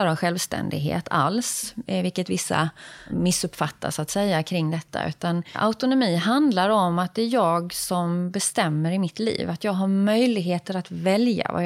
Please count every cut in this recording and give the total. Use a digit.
2